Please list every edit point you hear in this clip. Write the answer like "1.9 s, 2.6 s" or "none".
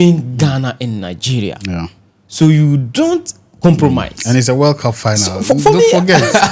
none